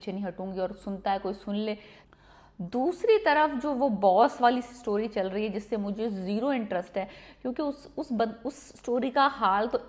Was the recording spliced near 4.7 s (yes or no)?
no